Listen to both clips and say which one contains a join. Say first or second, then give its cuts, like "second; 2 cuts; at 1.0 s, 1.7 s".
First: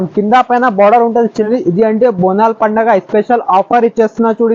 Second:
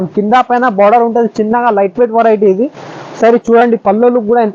first; 1 cut; at 1.5 s